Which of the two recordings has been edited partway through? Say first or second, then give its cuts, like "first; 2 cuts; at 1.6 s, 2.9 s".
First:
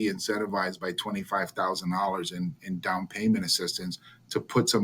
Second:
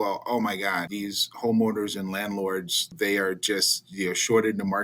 second; 2 cuts; at 0.9 s, 2.9 s